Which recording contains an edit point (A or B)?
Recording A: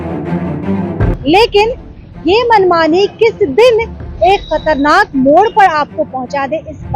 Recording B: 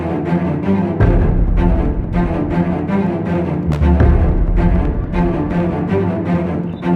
A